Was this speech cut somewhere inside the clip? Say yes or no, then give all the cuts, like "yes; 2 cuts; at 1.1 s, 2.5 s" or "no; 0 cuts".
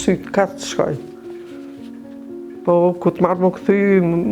yes; 2 cuts; at 1.0 s, 2.7 s